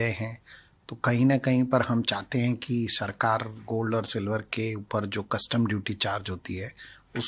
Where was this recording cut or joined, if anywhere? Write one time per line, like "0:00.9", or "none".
none